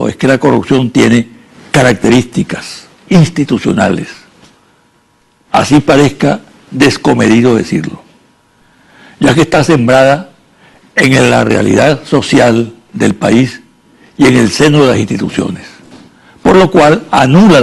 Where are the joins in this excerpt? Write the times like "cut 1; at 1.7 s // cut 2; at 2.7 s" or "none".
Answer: cut 1; at 6.3 s